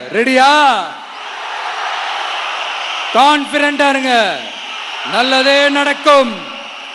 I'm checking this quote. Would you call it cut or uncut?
uncut